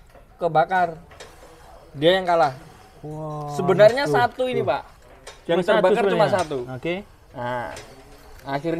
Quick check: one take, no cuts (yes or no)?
yes